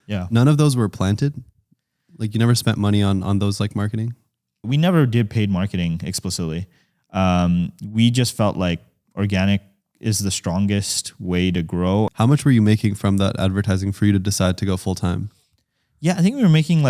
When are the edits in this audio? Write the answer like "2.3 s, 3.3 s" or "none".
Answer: 4.7 s, 12.1 s